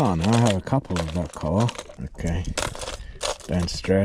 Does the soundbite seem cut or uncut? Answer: cut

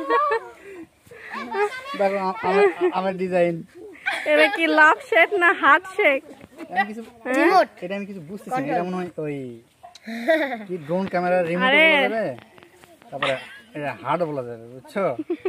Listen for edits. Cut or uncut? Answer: uncut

